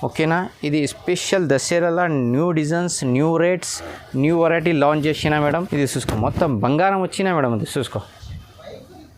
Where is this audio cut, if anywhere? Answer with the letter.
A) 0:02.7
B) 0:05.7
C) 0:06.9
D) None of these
B